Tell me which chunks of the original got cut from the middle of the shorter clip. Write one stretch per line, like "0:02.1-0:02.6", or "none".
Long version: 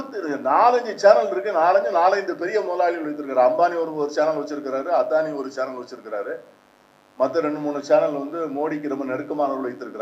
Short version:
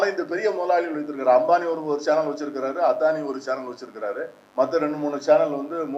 0:06.5-0:07.0